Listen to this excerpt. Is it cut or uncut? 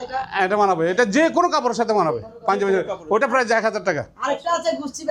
uncut